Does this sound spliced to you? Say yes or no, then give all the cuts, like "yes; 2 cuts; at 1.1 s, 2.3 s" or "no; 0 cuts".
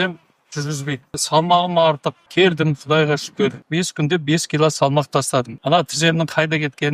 yes; 4 cuts; at 1.2 s, 2.2 s, 3.6 s, 5.5 s